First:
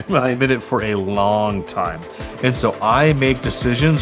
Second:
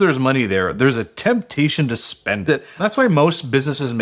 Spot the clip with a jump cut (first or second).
second